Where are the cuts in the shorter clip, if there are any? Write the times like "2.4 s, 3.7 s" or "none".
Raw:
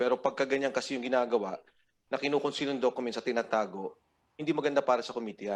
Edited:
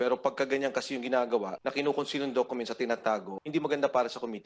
1.5 s, 3.3 s